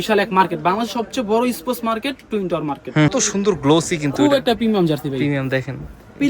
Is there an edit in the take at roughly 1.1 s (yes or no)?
no